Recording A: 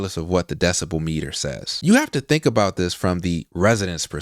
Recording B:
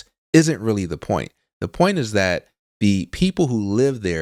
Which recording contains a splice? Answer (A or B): A